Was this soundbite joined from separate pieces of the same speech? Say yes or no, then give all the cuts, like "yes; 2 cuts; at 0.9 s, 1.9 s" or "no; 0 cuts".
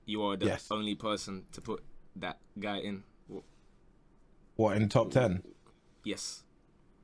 no; 0 cuts